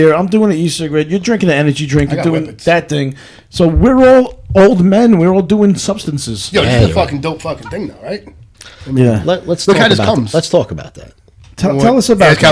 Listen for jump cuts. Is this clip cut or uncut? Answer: uncut